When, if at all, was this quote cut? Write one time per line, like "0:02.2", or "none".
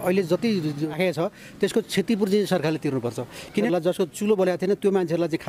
0:00.9
0:03.7